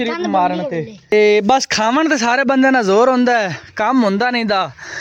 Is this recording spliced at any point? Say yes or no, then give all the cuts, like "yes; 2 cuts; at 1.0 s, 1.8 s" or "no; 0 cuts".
yes; 1 cut; at 1.1 s